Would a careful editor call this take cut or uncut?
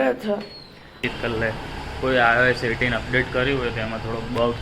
cut